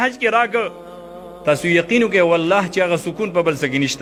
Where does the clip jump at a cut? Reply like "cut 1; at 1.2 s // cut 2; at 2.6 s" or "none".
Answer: none